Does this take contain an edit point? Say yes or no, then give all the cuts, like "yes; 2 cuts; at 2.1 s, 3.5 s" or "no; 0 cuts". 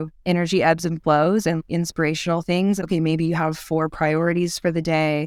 yes; 2 cuts; at 1.6 s, 2.8 s